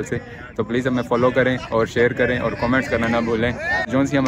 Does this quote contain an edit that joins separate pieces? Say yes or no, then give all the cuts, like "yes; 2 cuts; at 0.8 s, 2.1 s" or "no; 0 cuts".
no; 0 cuts